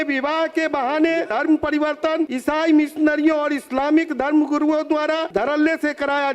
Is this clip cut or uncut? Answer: cut